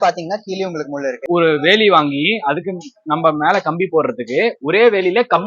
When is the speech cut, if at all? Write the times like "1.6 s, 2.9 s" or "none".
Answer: 1.3 s